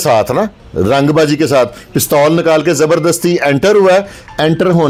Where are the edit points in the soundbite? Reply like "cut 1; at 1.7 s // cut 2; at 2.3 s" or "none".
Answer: none